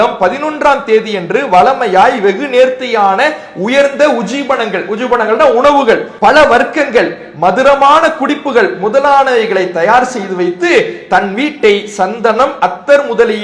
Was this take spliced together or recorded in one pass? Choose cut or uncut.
uncut